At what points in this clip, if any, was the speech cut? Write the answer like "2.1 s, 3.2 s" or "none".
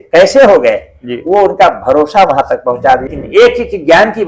3.1 s